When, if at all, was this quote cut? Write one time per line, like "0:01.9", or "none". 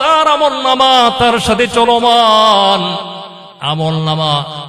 none

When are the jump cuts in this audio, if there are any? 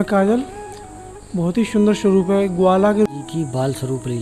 0:03.1

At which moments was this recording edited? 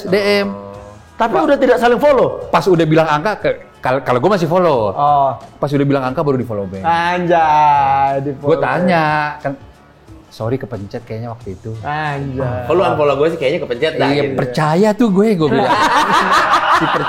none

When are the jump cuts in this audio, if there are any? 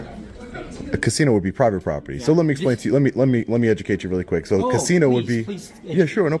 none

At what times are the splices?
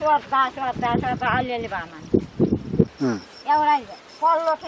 0:02.9

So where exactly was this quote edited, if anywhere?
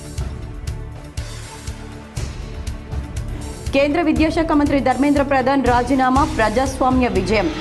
0:01.1

